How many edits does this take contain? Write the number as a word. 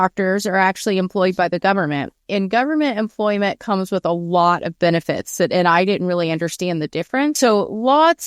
one